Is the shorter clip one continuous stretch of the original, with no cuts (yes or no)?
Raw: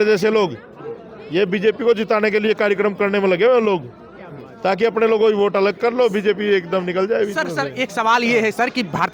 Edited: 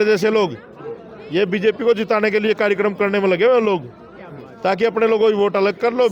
yes